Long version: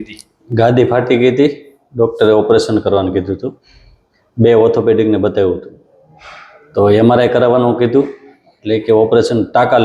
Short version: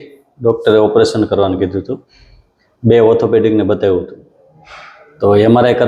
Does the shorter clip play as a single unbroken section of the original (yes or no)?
yes